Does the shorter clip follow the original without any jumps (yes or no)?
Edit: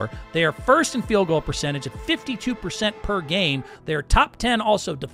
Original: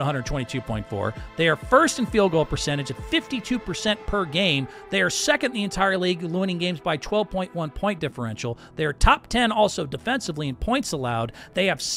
no